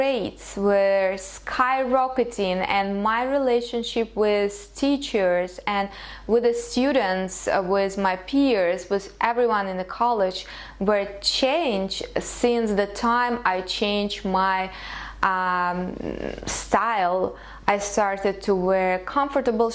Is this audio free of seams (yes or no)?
yes